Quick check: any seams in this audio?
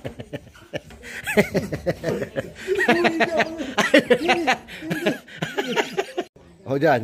no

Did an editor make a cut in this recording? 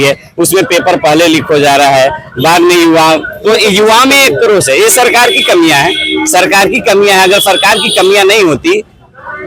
no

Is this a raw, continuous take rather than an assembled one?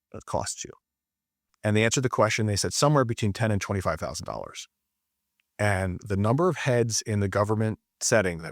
no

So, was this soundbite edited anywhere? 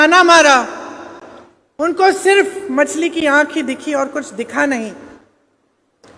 no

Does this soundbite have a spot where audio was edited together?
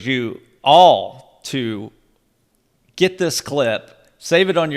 no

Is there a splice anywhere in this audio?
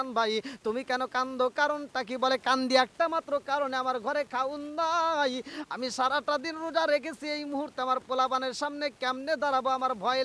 no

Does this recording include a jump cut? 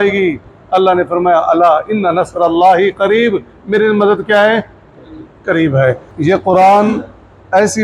yes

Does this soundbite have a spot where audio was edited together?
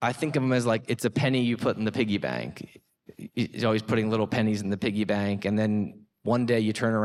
no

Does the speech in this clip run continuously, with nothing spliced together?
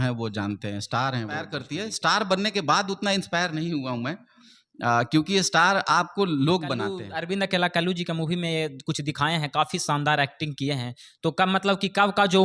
no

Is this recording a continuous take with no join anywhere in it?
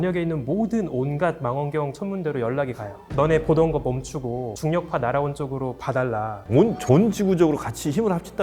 no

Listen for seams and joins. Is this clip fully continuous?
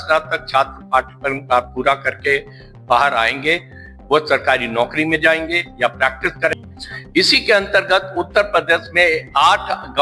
no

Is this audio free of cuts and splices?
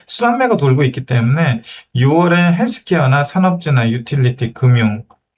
yes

